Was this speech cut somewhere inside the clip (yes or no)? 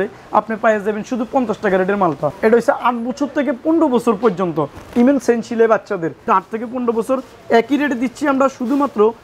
yes